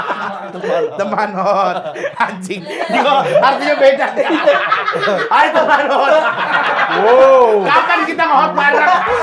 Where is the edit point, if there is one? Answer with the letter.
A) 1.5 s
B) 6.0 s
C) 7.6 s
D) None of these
D